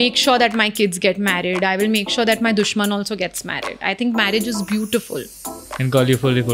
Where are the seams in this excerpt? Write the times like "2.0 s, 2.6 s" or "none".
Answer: none